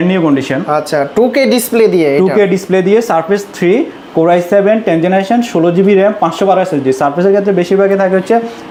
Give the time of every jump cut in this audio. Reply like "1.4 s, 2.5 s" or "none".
none